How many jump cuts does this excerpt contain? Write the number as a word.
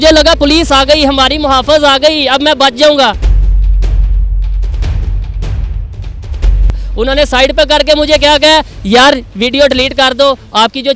two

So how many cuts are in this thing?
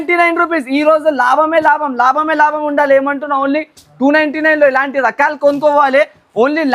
zero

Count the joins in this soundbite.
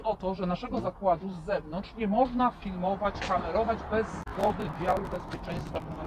zero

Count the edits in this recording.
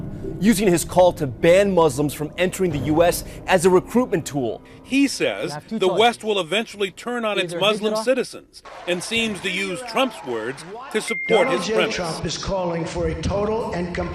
one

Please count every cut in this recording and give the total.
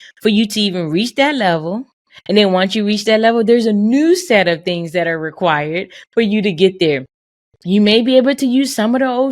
zero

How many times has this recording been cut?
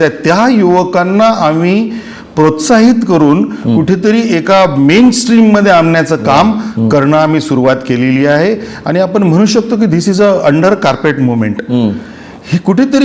zero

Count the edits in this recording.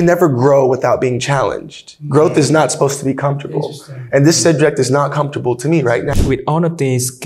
one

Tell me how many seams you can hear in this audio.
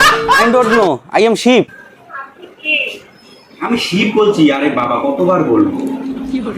one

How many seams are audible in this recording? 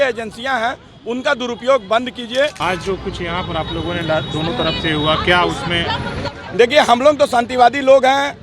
one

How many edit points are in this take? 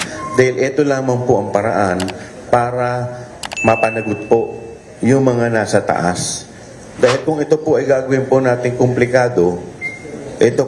zero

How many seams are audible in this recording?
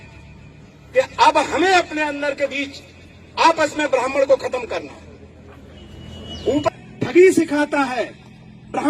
one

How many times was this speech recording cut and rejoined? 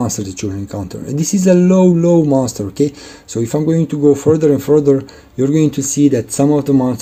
zero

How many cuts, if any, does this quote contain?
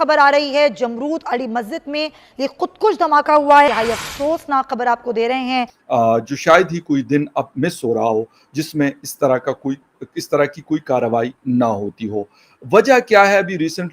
two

